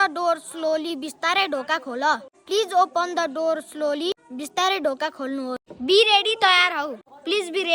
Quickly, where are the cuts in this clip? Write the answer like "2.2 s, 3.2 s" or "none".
5.7 s